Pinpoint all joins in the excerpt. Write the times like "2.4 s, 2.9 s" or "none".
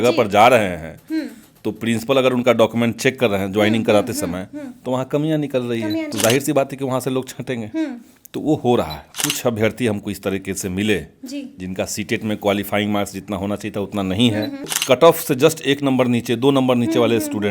6.1 s, 9.1 s, 14.7 s